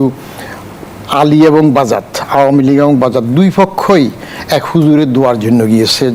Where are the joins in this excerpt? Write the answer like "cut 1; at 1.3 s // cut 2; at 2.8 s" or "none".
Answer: none